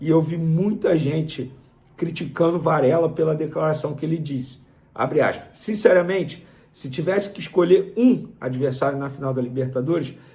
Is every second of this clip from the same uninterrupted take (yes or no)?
yes